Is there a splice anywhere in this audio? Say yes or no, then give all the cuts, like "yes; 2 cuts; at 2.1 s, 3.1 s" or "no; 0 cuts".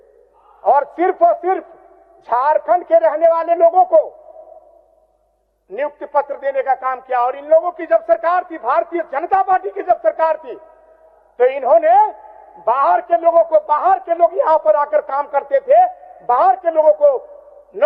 no; 0 cuts